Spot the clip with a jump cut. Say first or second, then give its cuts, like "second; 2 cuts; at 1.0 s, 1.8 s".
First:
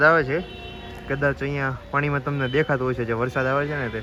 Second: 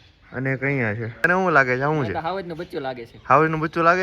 second; 1 cut; at 1.3 s